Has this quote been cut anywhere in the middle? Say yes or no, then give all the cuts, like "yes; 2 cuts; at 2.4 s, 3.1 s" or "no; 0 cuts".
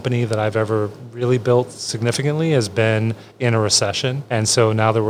yes; 1 cut; at 4.2 s